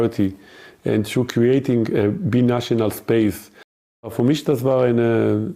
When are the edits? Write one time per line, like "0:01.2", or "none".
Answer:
0:04.0